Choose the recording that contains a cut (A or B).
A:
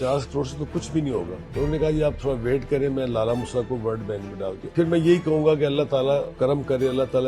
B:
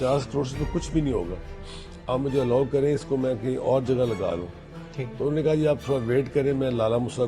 A